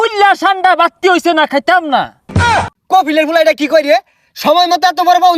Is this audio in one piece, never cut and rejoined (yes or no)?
no